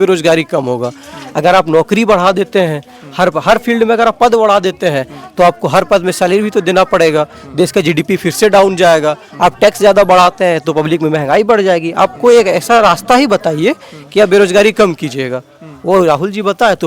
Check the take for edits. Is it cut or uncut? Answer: uncut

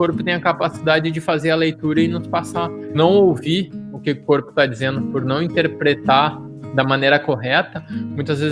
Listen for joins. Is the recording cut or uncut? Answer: cut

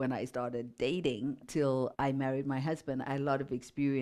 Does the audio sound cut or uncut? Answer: cut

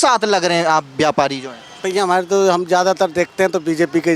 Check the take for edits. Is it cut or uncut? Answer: uncut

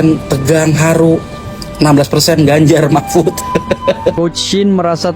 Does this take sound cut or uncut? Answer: cut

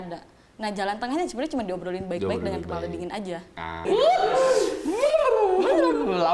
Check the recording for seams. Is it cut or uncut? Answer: cut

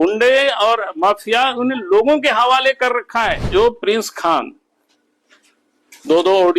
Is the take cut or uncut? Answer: cut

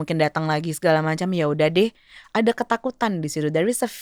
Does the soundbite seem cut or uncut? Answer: uncut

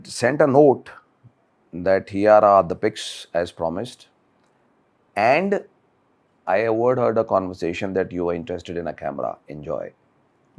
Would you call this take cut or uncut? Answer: uncut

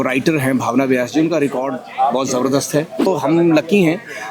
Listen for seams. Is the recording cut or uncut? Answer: cut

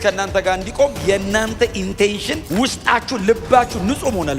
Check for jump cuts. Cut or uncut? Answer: cut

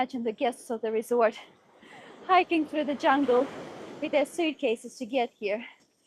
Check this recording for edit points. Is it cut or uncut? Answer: uncut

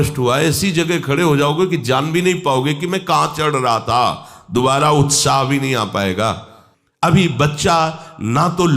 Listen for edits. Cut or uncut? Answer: cut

